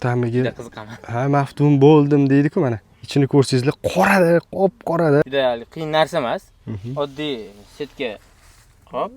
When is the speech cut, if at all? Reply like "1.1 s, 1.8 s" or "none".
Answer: 5.2 s